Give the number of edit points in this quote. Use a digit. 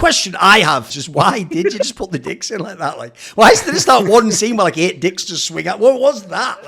1